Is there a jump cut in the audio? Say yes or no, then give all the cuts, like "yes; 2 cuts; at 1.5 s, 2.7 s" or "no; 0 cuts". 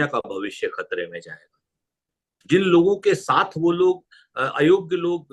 no; 0 cuts